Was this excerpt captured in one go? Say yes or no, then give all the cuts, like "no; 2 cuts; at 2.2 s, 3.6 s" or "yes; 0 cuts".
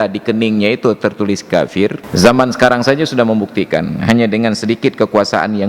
no; 1 cut; at 2.0 s